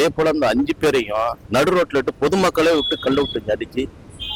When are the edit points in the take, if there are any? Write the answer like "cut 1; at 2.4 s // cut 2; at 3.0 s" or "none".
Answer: none